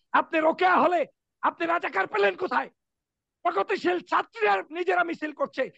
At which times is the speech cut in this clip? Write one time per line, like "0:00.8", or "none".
none